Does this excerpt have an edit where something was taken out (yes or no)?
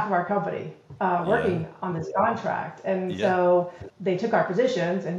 yes